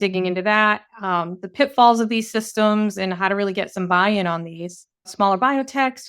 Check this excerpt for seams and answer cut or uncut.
cut